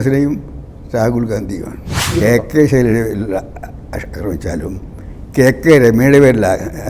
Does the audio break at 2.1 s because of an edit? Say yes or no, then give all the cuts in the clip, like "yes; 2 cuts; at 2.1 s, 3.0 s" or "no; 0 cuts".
yes; 1 cut; at 2.1 s